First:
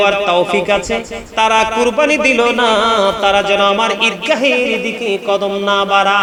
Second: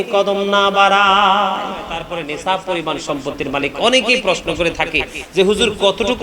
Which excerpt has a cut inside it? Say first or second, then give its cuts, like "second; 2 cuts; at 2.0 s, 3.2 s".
second; 1 cut; at 2.0 s